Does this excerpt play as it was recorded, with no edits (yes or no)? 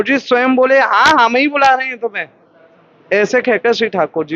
yes